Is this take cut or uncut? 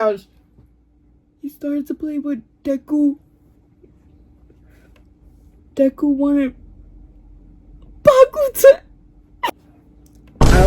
cut